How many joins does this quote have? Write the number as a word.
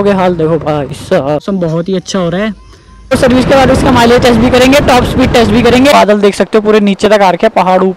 three